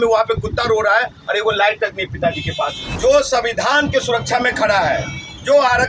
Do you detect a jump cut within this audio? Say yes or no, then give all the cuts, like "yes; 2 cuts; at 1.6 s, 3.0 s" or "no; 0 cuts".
yes; 1 cut; at 2.8 s